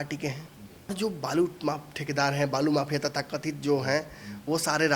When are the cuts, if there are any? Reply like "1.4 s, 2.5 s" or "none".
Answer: 0.9 s